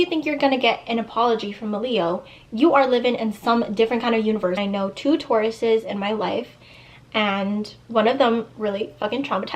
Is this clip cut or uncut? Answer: cut